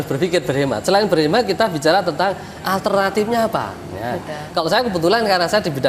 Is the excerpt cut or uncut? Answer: uncut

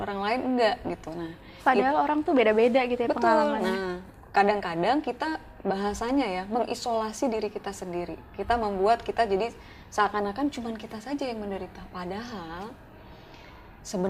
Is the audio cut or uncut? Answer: uncut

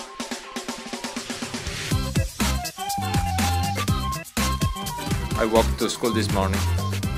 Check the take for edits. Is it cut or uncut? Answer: cut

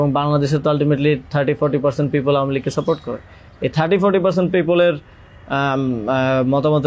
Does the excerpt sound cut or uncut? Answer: uncut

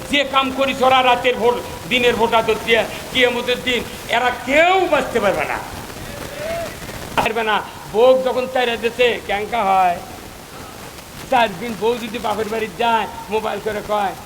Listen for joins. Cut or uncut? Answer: cut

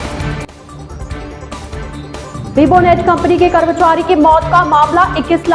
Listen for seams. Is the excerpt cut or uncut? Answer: cut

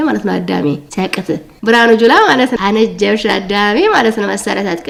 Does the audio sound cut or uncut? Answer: uncut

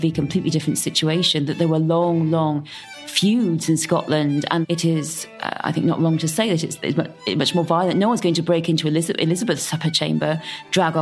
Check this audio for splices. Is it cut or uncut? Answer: cut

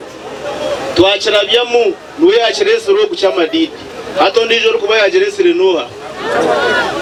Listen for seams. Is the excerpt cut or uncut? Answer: uncut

